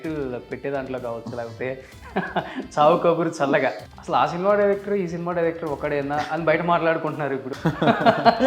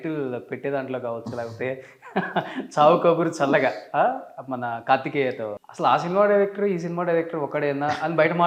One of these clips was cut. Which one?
first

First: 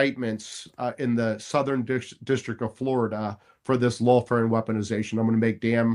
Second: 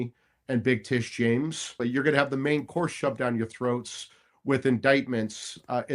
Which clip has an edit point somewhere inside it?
second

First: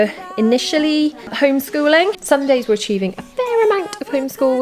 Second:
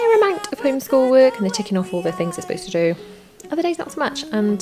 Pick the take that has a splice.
first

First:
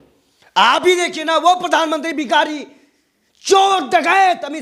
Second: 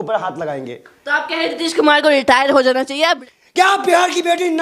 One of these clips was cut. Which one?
second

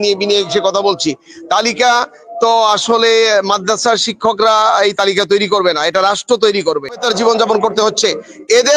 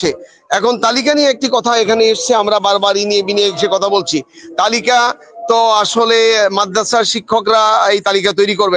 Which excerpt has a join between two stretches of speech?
first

